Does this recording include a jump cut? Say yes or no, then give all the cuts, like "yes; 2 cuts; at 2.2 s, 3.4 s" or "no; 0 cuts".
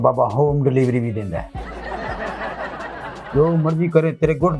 yes; 2 cuts; at 1.7 s, 3.0 s